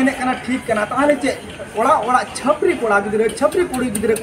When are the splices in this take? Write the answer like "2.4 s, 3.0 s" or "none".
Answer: none